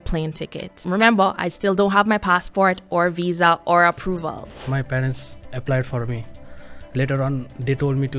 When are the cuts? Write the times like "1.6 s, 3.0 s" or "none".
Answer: 0.8 s, 4.5 s, 6.4 s